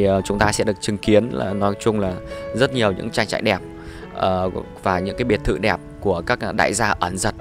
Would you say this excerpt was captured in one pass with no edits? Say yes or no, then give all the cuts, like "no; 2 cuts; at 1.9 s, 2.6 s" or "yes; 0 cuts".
yes; 0 cuts